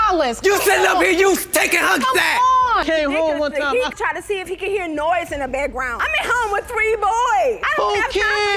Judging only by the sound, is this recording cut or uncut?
cut